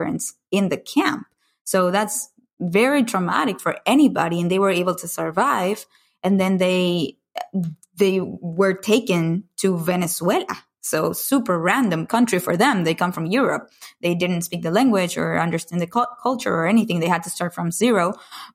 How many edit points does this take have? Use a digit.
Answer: 0